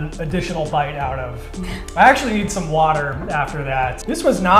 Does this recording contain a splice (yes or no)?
no